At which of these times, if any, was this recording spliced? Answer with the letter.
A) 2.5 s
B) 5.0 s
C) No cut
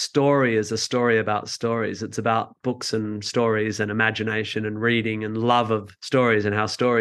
C